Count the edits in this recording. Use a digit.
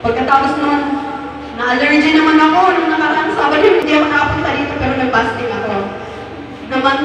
1